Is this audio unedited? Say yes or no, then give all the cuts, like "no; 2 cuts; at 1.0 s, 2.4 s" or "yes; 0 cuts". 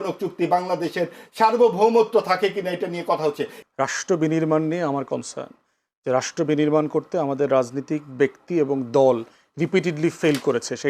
no; 1 cut; at 3.6 s